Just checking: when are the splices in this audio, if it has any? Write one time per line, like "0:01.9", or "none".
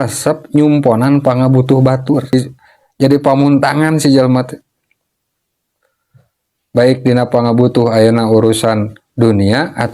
0:02.3